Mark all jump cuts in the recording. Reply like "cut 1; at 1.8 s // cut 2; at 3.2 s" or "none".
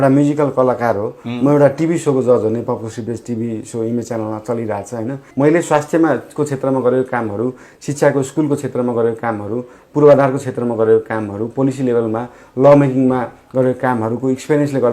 cut 1; at 5.2 s